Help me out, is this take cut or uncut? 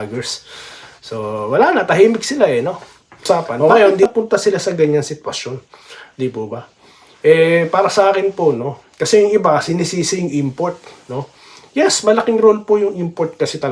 cut